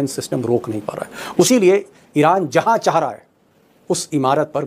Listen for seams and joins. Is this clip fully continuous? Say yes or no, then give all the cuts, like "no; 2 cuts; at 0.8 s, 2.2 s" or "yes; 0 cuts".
no; 1 cut; at 1.5 s